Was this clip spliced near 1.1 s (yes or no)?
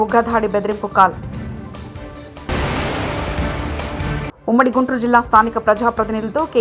no